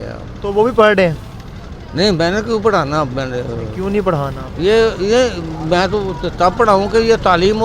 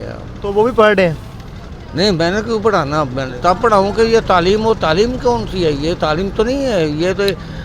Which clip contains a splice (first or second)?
second